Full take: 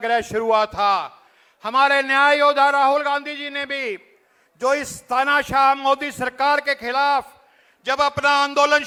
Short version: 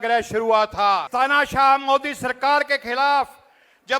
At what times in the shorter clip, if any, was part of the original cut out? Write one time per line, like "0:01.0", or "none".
0:01.1